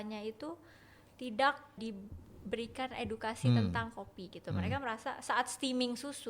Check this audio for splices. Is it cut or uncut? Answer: cut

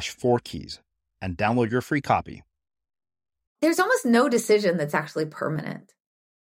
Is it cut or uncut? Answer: cut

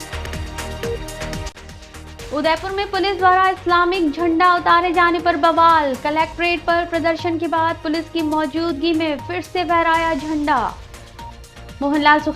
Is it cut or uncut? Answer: cut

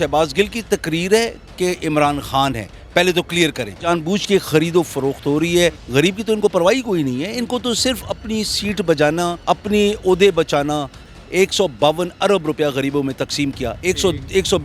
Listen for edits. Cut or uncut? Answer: cut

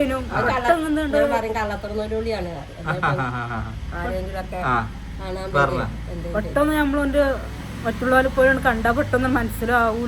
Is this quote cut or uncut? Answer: uncut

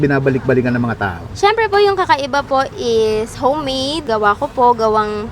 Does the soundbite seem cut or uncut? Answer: cut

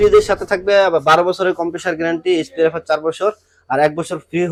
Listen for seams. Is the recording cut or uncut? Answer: uncut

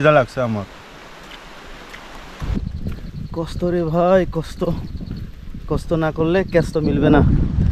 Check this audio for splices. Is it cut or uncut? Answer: cut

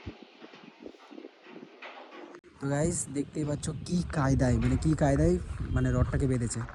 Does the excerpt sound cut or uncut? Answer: uncut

